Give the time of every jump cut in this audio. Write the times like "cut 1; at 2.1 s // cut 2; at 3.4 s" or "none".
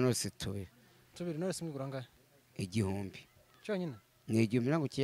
none

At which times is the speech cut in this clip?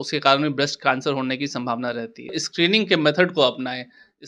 cut 1; at 2.4 s

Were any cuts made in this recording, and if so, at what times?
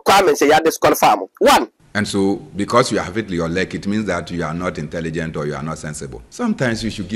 cut 1; at 1.8 s // cut 2; at 6.2 s

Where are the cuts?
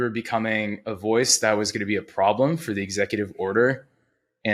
none

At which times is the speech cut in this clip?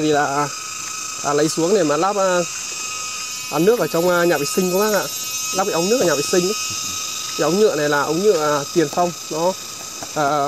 none

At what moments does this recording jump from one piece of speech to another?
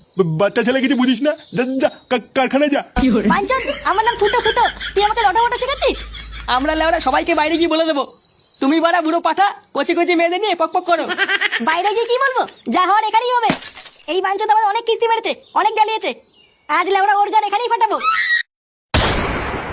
cut 1; at 18.7 s

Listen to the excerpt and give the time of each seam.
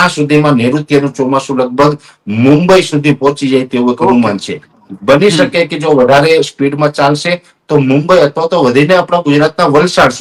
none

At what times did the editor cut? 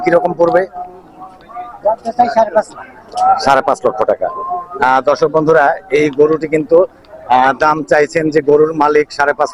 none

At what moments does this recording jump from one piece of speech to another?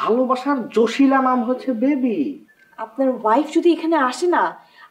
none

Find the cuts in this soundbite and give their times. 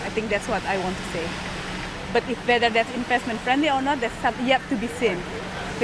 none

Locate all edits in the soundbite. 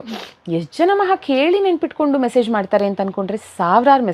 none

